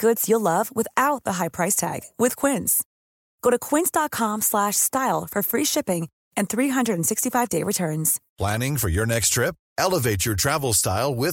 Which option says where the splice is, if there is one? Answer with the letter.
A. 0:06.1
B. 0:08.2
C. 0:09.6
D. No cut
B